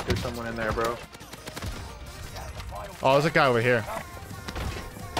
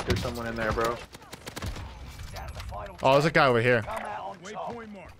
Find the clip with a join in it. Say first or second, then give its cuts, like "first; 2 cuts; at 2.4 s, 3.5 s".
first; 1 cut; at 4.0 s